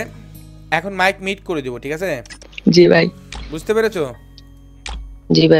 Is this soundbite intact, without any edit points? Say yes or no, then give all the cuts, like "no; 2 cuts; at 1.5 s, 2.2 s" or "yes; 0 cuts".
yes; 0 cuts